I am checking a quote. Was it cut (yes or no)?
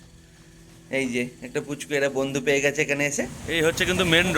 yes